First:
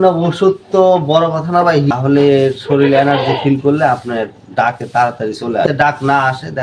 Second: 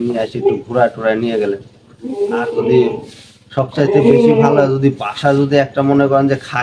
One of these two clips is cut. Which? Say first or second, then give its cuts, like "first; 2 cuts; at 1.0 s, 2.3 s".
first; 2 cuts; at 1.9 s, 5.6 s